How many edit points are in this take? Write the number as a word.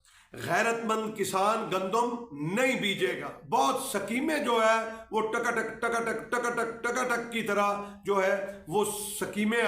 one